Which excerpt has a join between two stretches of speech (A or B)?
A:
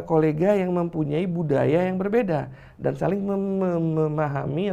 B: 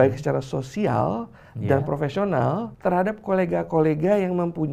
B